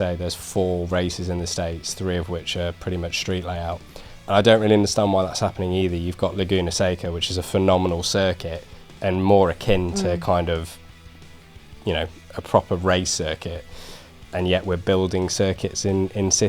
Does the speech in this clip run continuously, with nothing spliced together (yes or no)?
yes